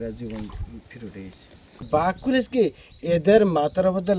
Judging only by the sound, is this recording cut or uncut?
cut